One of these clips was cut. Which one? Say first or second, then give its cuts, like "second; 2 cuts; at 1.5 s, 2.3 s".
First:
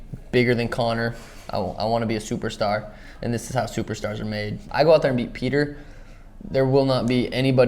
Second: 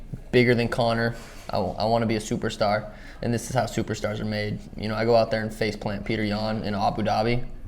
first; 1 cut; at 4.6 s